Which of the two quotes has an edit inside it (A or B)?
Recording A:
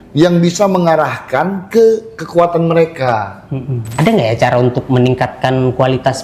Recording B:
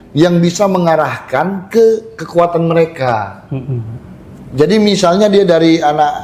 A